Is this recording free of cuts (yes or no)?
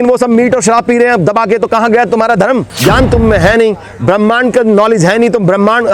no